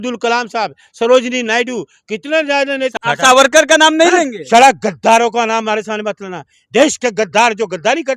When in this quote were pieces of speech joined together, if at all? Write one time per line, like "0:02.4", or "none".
0:02.9